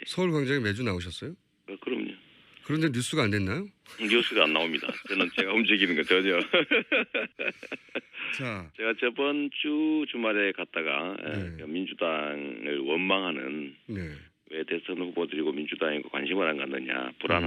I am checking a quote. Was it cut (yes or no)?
yes